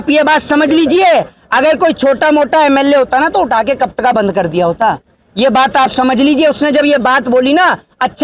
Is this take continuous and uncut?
yes; 0 cuts

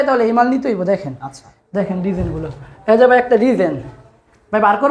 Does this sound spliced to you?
no; 0 cuts

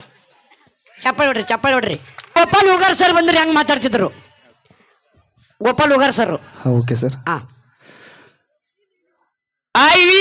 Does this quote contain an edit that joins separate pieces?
yes; 1 cut; at 2.3 s

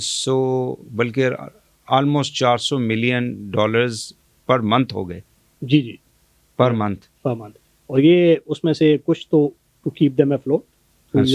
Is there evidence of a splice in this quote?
no; 0 cuts

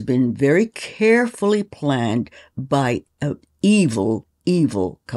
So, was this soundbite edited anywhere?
no; 0 cuts

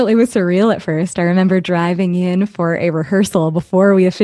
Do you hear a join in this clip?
no; 0 cuts

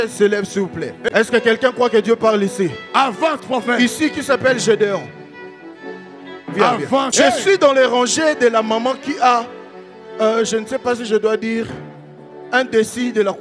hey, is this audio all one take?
no; 2 cuts; at 1.1 s, 7.1 s

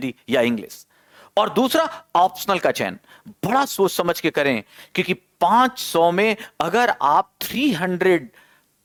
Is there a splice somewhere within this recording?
no; 0 cuts

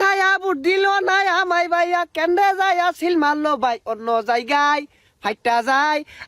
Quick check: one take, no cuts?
yes; 0 cuts

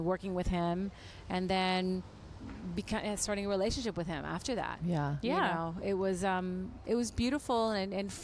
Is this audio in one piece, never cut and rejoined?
yes; 0 cuts

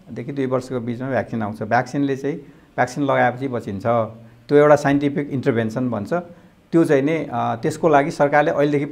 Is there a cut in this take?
no; 0 cuts

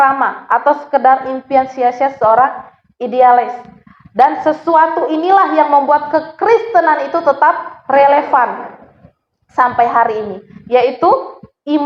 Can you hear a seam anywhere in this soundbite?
no; 0 cuts

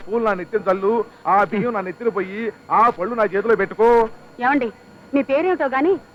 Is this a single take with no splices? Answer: yes; 0 cuts

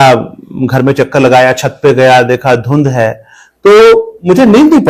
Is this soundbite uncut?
yes; 0 cuts

